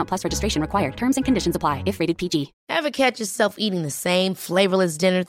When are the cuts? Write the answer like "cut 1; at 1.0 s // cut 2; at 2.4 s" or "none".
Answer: cut 1; at 2.6 s